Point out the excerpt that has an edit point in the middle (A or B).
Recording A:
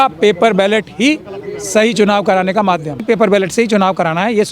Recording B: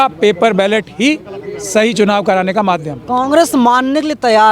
A